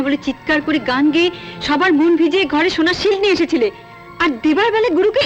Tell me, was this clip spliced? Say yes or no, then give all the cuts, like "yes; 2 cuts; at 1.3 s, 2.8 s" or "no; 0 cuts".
no; 0 cuts